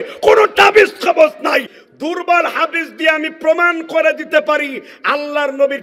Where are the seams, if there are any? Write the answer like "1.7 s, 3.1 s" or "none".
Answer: 1.8 s